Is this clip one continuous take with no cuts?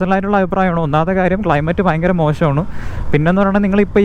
yes; 0 cuts

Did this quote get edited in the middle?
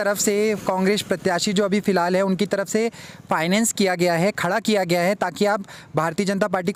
no; 0 cuts

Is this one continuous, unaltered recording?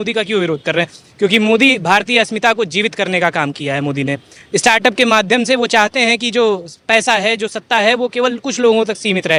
yes; 0 cuts

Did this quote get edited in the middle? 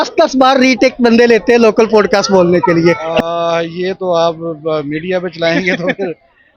yes; 1 cut; at 3.1 s

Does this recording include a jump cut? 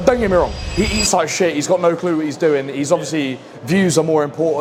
no; 0 cuts

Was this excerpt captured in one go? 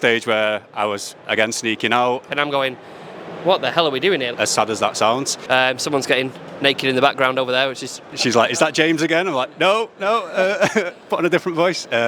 no; 4 cuts; at 2.3 s, 4.3 s, 5.3 s, 8.0 s

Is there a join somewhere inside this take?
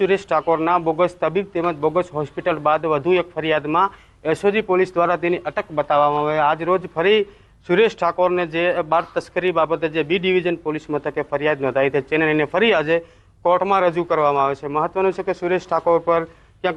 no; 0 cuts

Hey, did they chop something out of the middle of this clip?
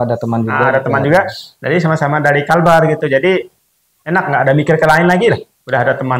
no; 0 cuts

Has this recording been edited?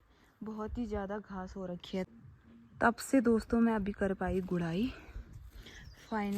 yes; 1 cut; at 2.1 s

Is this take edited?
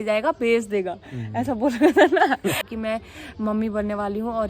yes; 1 cut; at 2.6 s

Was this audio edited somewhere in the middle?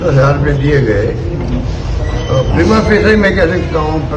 no; 0 cuts

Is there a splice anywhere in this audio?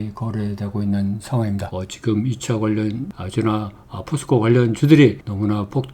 yes; 2 cuts; at 1.7 s, 3.1 s

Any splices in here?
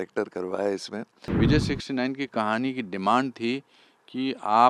yes; 1 cut; at 1.2 s

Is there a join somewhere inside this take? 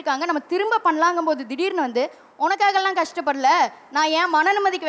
no; 0 cuts

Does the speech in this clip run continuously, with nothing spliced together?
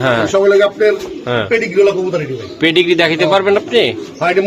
yes; 0 cuts

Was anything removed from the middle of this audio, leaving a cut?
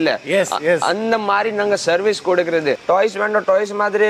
yes; 1 cut; at 2.8 s

